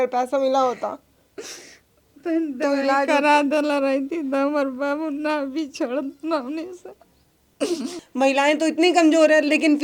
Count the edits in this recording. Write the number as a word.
one